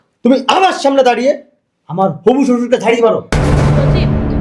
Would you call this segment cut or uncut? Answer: uncut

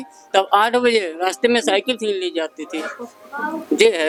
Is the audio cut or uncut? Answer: uncut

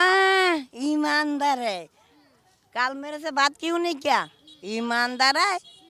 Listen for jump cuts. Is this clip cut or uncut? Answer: uncut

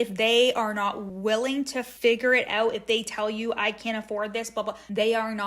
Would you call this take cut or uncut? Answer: cut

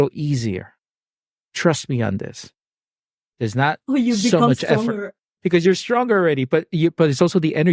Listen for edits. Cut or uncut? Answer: uncut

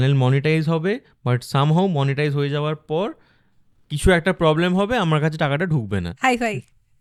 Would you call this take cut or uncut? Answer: uncut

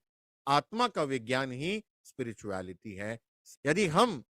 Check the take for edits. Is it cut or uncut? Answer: cut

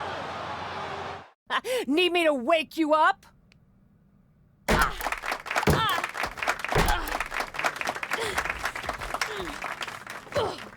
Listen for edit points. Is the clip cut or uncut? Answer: cut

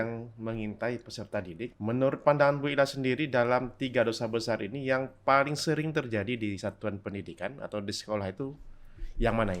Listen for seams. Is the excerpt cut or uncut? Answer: cut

